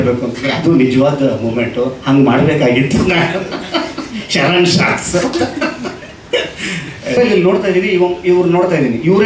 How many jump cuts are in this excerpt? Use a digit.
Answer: 1